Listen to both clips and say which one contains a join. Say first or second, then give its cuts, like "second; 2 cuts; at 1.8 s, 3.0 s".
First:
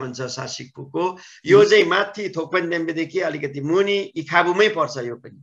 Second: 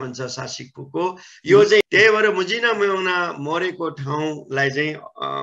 second; 1 cut; at 1.9 s